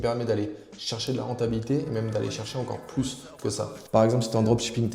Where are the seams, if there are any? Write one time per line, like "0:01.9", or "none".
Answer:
0:03.9